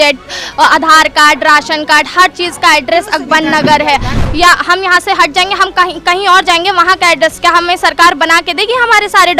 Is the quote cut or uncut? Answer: cut